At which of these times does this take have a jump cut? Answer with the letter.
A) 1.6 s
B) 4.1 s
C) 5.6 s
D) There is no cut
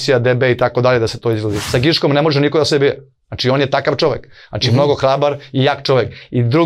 A